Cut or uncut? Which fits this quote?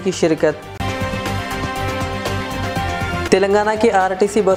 uncut